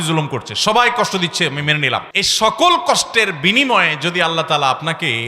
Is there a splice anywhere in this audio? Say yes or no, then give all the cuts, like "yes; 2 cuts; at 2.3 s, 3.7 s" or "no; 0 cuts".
yes; 1 cut; at 2.2 s